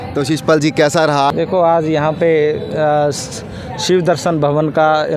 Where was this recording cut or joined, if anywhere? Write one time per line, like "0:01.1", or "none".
0:01.3